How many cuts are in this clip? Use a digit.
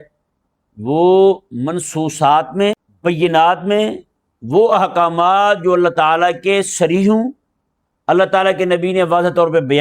1